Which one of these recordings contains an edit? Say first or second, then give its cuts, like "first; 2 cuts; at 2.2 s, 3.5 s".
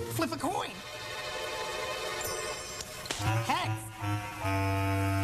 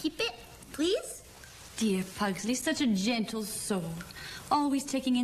second; 1 cut; at 3.1 s